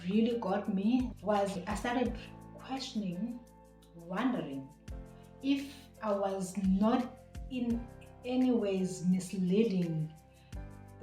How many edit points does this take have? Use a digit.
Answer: 1